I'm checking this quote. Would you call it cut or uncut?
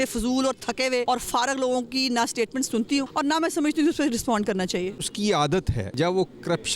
cut